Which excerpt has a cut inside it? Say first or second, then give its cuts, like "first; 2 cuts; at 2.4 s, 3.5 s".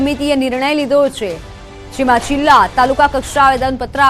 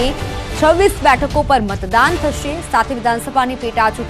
second; 1 cut; at 2.4 s